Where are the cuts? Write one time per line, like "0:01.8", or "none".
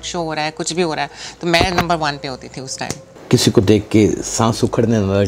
0:03.0